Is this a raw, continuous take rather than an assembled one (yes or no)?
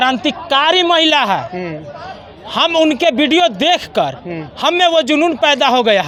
yes